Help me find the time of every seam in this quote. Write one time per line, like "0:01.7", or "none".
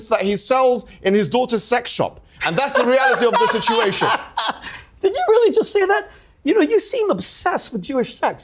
none